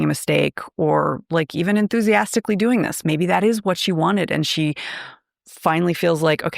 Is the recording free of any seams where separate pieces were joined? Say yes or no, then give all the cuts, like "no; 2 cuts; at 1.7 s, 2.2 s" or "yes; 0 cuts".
no; 1 cut; at 3.0 s